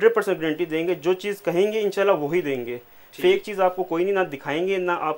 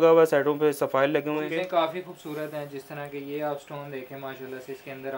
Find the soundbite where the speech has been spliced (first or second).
second